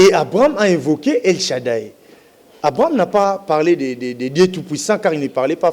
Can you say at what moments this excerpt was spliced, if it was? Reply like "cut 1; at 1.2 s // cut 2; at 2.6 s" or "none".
none